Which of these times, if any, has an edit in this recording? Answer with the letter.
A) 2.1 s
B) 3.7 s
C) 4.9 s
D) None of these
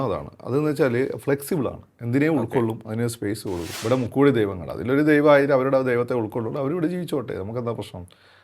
B